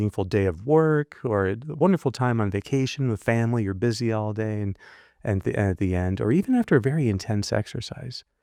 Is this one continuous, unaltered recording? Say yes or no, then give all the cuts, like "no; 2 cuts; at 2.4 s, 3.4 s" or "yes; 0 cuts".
yes; 0 cuts